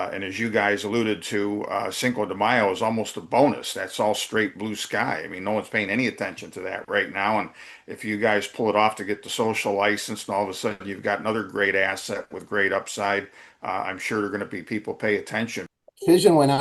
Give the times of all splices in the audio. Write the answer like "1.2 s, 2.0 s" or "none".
15.6 s